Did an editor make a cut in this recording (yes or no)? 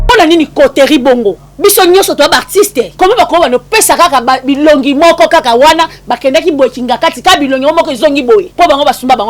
yes